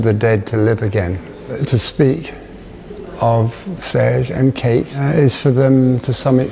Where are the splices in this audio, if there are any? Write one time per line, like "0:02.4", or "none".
0:01.6
0:05.0